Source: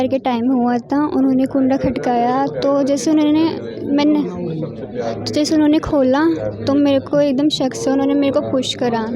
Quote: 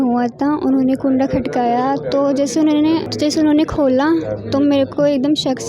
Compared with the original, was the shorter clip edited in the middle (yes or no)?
yes